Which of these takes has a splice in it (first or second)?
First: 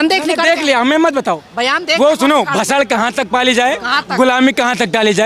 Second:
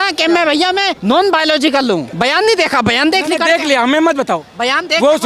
second